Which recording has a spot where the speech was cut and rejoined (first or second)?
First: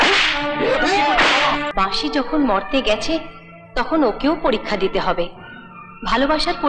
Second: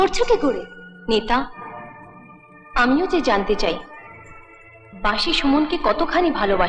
first